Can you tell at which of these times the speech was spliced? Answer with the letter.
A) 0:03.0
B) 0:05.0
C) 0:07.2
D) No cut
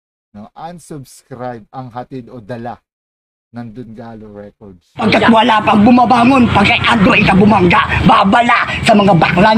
B